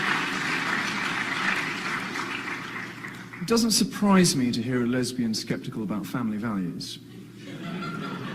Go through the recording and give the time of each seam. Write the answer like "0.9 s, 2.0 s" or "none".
1.9 s